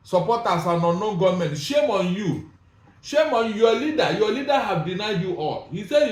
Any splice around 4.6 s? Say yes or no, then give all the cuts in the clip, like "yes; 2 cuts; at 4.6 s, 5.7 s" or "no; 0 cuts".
no; 0 cuts